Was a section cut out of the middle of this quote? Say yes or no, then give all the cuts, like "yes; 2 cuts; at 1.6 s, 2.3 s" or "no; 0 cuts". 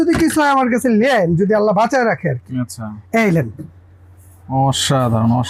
no; 0 cuts